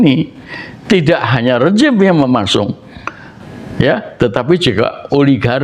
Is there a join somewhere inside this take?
no; 0 cuts

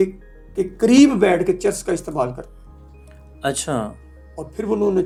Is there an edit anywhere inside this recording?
no; 0 cuts

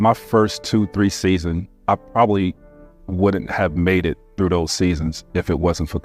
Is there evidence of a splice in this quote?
yes; 1 cut; at 1.7 s

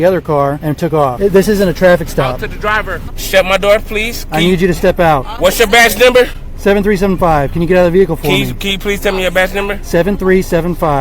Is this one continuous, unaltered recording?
no; 2 cuts; at 1.1 s, 3.0 s

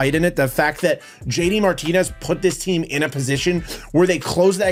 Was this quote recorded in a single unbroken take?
yes; 0 cuts

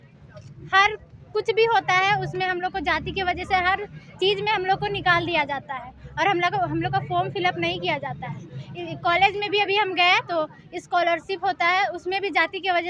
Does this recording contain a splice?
no; 0 cuts

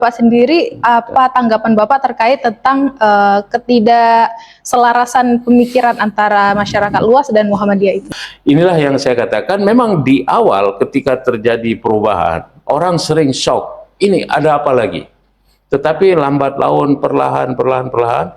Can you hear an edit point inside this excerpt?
yes; 1 cut; at 8.0 s

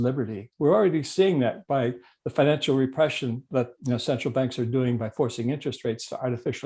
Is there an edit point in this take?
no; 0 cuts

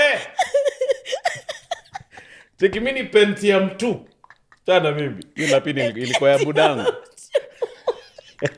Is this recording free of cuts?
yes; 0 cuts

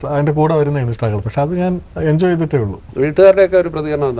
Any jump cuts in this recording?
no; 0 cuts

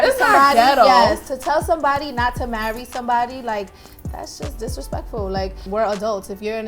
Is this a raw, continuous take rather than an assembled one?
no; 1 cut; at 5.6 s

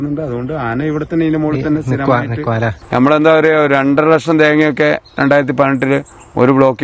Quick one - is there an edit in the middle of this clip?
yes; 1 cut; at 2.8 s

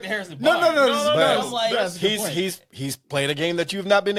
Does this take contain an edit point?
no; 0 cuts

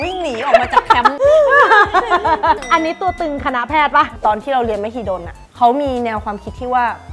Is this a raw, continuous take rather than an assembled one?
no; 3 cuts; at 1.2 s, 2.6 s, 4.1 s

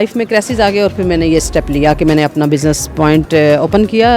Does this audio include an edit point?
no; 0 cuts

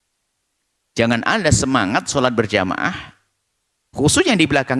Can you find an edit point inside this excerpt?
no; 0 cuts

